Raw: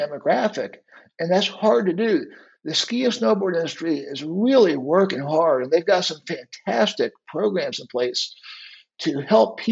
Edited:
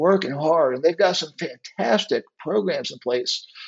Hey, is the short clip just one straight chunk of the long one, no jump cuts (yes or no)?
yes